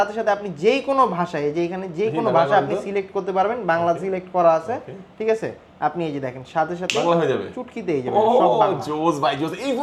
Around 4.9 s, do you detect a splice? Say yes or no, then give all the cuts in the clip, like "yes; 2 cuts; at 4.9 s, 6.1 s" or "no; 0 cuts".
no; 0 cuts